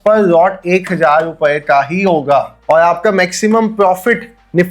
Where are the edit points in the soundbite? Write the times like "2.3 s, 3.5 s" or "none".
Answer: none